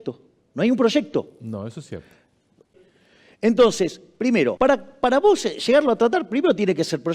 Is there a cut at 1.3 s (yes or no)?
no